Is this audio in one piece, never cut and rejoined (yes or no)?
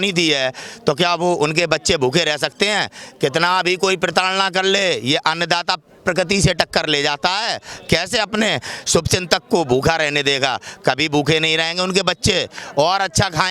yes